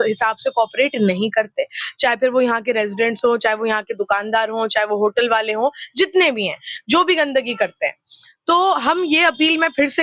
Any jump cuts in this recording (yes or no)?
no